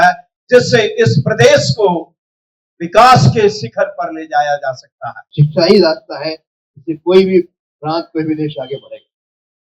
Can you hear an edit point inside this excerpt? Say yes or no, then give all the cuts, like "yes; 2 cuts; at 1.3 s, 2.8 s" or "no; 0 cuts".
yes; 1 cut; at 5.3 s